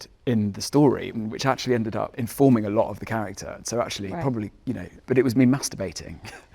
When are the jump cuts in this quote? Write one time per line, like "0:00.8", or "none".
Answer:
0:01.1
0:02.2